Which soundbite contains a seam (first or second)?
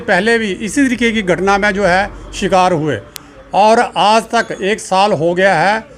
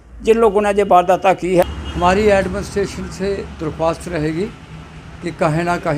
second